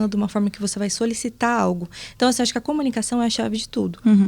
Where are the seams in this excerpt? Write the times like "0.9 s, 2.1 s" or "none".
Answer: none